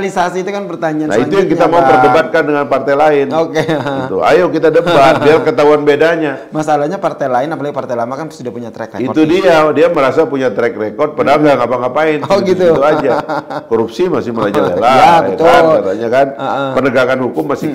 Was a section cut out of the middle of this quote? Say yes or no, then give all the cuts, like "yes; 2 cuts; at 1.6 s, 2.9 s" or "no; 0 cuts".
no; 0 cuts